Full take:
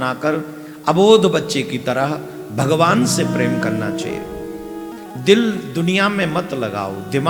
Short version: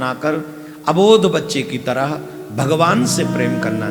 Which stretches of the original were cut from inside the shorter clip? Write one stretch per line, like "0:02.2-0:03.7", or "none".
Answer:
none